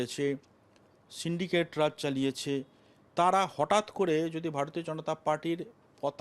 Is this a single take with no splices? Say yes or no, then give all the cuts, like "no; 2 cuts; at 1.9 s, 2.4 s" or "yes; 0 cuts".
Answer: yes; 0 cuts